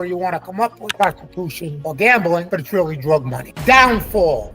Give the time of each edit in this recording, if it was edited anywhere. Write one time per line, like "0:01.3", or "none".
0:00.9